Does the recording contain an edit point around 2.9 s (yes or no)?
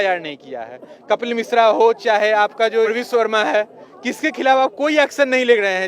yes